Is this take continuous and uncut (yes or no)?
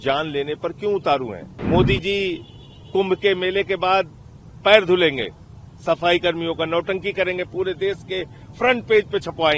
no